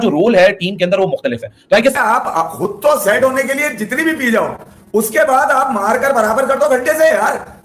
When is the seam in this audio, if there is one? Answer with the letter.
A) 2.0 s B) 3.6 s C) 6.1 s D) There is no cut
A